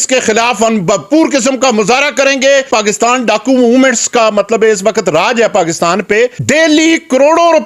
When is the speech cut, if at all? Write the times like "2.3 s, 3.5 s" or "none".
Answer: 2.7 s, 6.4 s